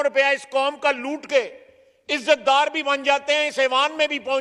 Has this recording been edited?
no; 0 cuts

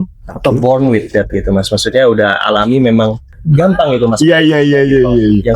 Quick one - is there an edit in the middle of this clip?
yes; 1 cut; at 3.3 s

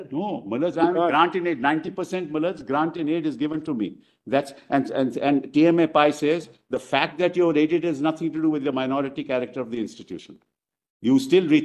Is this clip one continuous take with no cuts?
yes; 0 cuts

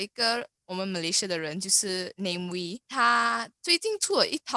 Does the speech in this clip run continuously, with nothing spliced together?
no; 1 cut; at 2.8 s

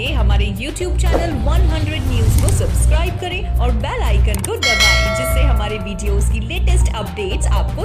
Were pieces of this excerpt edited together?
no; 0 cuts

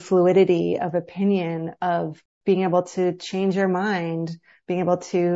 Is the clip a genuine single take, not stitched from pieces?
yes; 0 cuts

